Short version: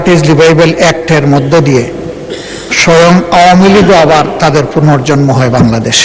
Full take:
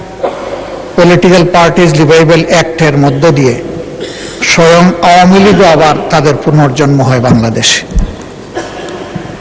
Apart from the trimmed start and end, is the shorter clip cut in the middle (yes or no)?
no